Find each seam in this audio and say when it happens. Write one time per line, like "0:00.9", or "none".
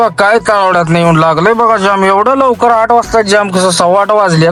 none